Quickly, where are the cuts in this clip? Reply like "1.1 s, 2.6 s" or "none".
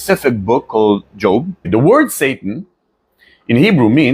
1.7 s